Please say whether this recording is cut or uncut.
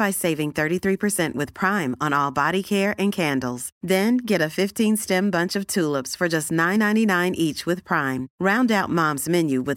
uncut